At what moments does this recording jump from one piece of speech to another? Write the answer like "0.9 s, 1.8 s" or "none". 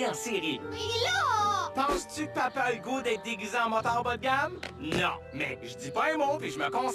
1.2 s